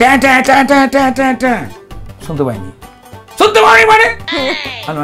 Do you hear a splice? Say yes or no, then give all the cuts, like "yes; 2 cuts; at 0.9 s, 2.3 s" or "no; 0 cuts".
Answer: no; 0 cuts